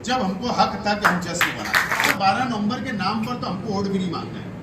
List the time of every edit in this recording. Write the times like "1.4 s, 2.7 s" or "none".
2.1 s